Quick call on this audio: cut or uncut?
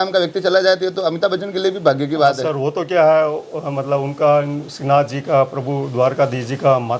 uncut